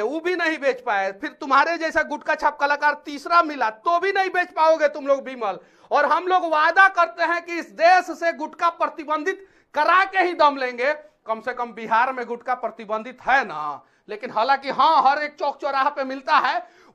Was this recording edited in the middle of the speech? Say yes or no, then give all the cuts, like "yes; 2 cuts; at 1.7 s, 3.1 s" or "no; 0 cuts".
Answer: no; 0 cuts